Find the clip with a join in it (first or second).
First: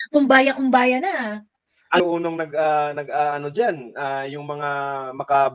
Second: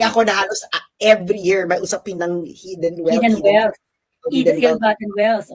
first